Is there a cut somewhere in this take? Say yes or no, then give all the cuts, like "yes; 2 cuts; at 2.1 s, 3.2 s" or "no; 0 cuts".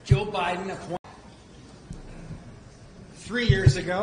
yes; 1 cut; at 1.0 s